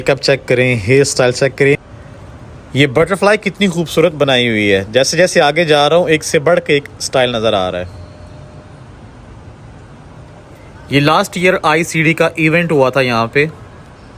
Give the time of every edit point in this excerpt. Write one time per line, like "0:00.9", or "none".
none